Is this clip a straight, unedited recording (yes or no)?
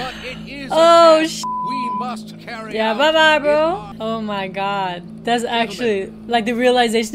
no